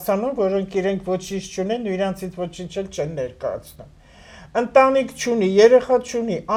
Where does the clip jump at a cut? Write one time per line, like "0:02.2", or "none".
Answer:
none